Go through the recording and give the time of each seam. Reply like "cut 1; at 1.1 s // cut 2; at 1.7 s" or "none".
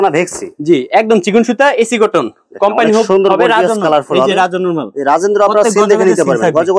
none